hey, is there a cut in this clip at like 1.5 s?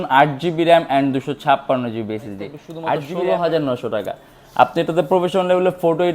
no; 1 cut; at 3.0 s

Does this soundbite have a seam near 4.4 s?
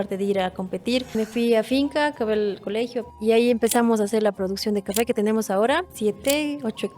no; 3 cuts; at 1.2 s, 3.0 s, 5.9 s

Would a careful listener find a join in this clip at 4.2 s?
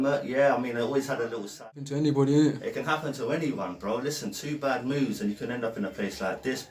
no; 1 cut; at 1.6 s

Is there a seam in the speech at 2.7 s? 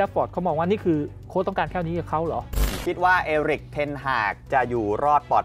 yes; 1 cut; at 2.7 s

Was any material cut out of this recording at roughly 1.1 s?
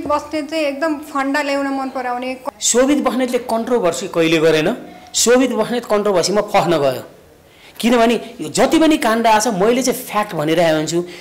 no; 1 cut; at 2.4 s

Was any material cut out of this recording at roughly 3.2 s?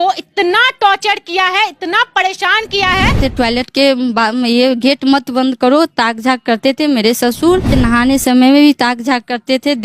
yes; 2 cuts; at 3.2 s, 7.7 s

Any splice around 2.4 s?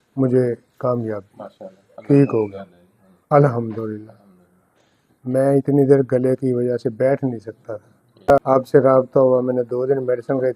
no; 1 cut; at 8.4 s

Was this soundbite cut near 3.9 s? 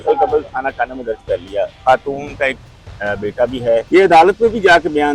yes; 2 cuts; at 1.8 s, 3.9 s

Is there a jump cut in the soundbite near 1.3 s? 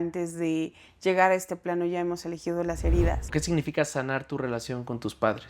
no; 1 cut; at 3.3 s

